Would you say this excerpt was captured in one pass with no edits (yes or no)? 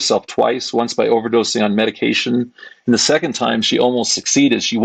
yes